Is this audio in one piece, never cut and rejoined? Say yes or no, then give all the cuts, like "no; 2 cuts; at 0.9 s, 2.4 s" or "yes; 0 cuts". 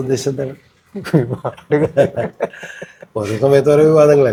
yes; 0 cuts